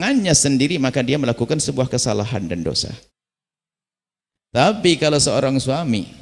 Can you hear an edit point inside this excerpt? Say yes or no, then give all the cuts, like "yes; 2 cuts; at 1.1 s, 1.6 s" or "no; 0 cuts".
no; 0 cuts